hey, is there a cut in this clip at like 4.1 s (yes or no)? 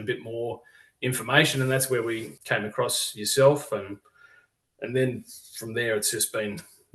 no